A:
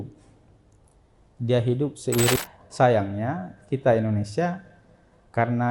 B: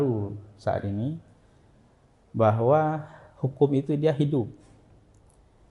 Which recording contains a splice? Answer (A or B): A